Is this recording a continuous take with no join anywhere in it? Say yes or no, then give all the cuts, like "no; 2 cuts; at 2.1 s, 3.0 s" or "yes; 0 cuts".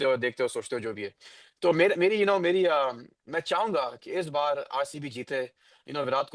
yes; 0 cuts